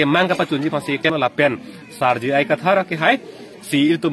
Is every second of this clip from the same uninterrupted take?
no; 1 cut; at 1.1 s

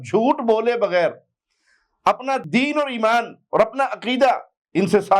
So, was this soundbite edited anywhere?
yes; 1 cut; at 2.5 s

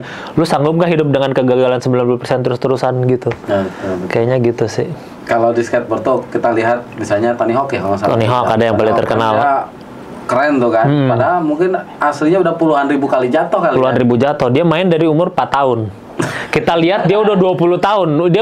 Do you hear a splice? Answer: no; 0 cuts

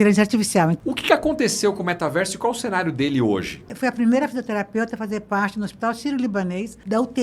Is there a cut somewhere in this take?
yes; 2 cuts; at 0.8 s, 3.7 s

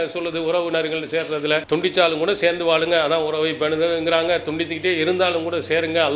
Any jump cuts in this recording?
yes; 1 cut; at 1.6 s

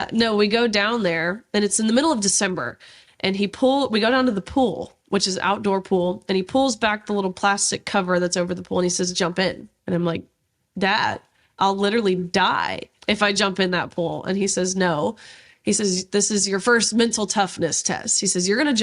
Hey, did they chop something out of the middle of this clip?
no; 0 cuts

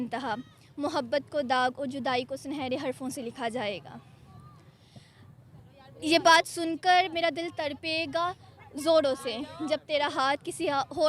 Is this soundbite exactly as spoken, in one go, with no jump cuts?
yes; 0 cuts

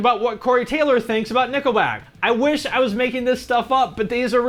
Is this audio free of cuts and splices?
yes; 0 cuts

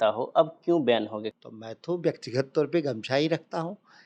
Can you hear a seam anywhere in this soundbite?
yes; 1 cut; at 1.2 s

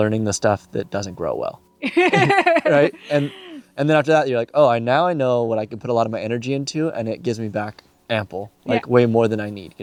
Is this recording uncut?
yes; 0 cuts

